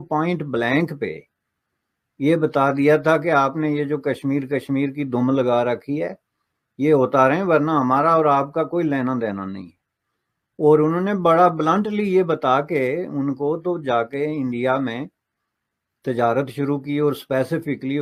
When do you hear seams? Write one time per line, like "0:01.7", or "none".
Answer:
none